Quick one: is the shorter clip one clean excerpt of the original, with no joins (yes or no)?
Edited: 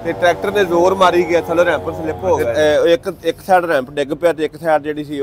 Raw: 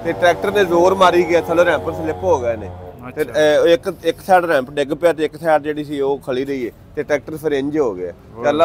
no